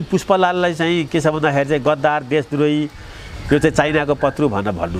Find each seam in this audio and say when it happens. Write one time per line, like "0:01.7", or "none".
none